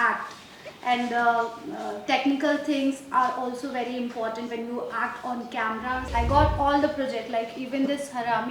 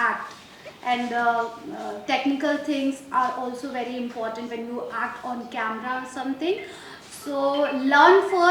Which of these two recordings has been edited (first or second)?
first